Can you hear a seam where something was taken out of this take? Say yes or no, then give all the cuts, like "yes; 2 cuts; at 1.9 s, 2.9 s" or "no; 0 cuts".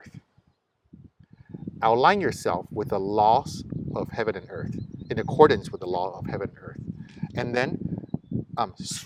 no; 0 cuts